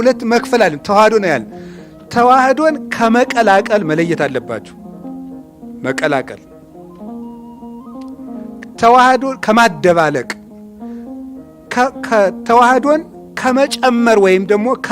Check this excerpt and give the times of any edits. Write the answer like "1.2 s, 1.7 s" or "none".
6.6 s, 8.7 s

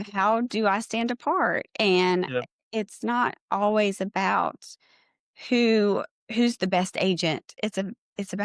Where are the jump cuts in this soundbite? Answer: 7.5 s

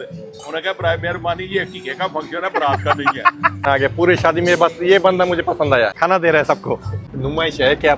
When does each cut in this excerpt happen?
3.6 s, 5.9 s, 7.1 s

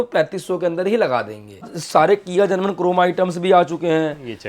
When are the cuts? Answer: 1.8 s

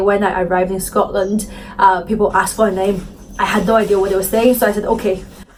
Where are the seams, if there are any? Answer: none

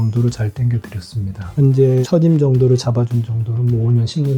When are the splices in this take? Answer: 1.5 s

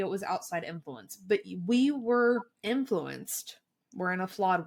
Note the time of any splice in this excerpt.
2.5 s

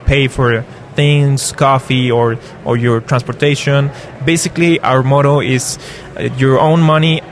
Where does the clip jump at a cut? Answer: none

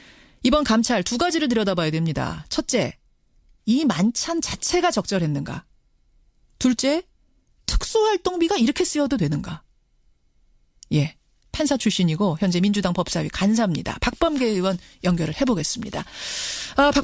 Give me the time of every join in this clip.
10.4 s

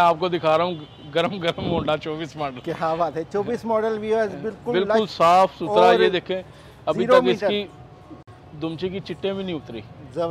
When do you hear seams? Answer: none

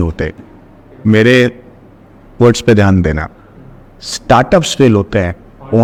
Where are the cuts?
none

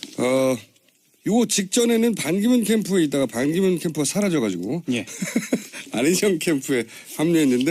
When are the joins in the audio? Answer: 2.5 s

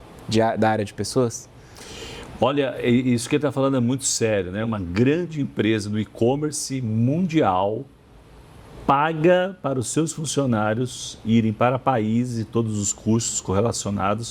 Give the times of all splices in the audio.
4.7 s

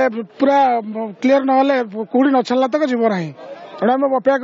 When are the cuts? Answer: none

